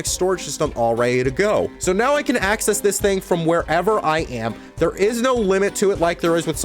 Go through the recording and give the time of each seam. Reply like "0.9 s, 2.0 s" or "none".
1.7 s